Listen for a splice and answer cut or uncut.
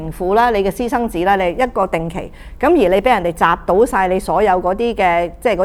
uncut